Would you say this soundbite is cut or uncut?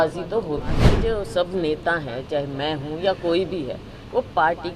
cut